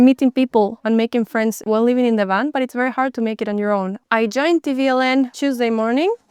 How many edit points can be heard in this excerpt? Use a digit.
2